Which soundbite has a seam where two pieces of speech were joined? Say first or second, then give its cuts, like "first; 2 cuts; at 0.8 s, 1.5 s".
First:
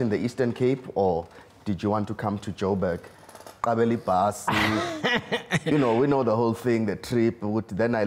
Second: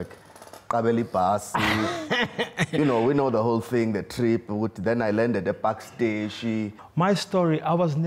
second; 1 cut; at 6.8 s